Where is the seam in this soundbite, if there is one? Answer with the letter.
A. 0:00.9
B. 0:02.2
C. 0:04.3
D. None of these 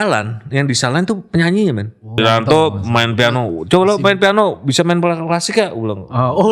B